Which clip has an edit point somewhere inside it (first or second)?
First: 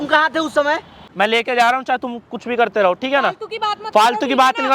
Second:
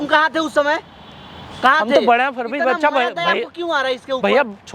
first